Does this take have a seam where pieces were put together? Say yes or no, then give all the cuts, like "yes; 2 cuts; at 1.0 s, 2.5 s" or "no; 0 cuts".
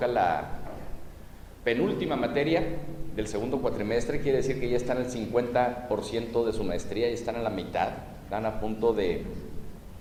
no; 0 cuts